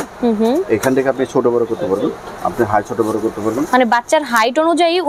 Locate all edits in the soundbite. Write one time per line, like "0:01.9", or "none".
none